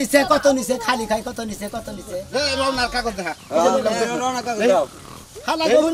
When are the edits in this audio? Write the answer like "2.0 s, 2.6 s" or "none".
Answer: 2.2 s